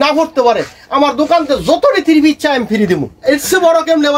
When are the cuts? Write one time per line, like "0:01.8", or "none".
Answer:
0:03.1